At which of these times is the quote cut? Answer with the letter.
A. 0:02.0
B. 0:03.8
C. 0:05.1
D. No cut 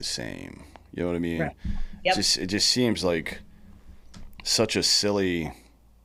D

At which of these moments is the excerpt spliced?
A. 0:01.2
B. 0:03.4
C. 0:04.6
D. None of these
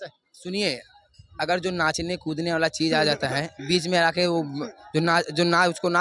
D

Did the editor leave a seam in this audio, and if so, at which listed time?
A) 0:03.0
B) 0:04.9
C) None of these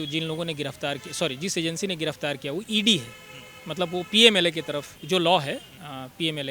B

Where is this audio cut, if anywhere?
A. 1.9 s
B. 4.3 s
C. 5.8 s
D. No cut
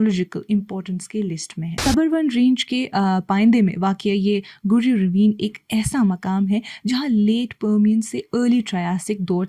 A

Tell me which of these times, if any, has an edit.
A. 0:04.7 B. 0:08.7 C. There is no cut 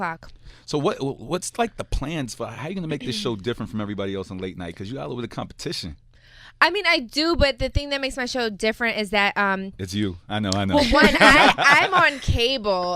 A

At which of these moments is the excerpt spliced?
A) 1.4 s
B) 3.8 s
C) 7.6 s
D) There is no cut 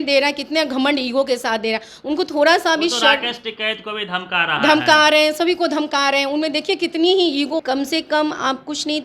C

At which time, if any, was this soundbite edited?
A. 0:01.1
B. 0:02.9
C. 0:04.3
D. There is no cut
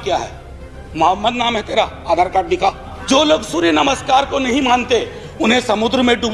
B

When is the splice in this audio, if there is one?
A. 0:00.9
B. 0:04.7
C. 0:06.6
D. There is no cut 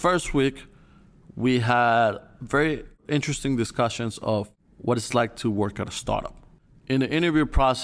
C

